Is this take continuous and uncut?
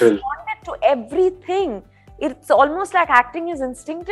yes; 0 cuts

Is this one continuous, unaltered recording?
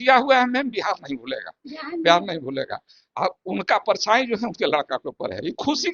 yes; 0 cuts

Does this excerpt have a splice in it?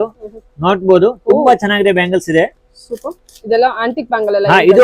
no; 0 cuts

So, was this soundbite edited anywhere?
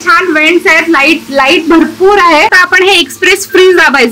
yes; 1 cut; at 2.6 s

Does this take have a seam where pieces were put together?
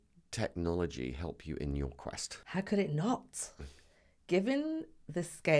no; 0 cuts

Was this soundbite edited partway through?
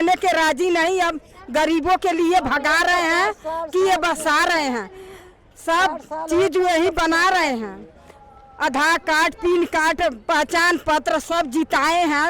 no; 0 cuts

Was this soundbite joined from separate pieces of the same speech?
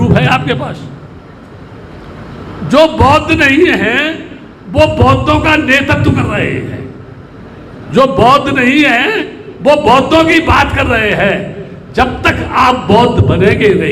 no; 0 cuts

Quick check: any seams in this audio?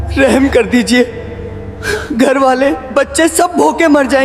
no; 0 cuts

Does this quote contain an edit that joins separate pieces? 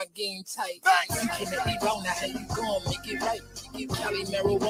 no; 0 cuts

